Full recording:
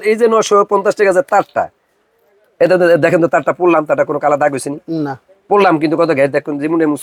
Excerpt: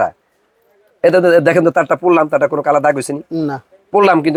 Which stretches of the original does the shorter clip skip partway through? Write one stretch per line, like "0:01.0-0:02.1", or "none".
none